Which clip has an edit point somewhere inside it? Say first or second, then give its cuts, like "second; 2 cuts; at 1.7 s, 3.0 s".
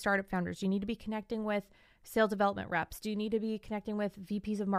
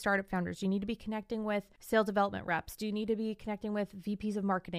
second; 1 cut; at 1.7 s